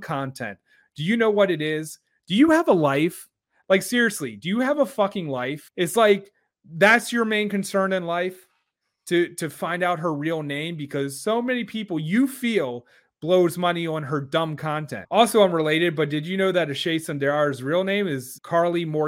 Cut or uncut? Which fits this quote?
cut